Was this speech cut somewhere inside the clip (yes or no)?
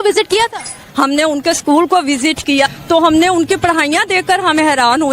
yes